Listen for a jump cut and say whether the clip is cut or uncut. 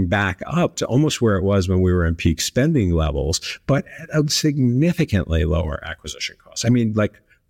uncut